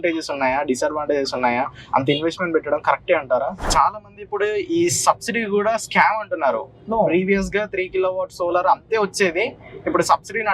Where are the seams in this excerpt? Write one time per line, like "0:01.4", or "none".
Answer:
0:03.6